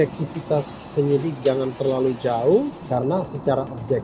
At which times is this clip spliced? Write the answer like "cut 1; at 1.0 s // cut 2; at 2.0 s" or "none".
cut 1; at 2.8 s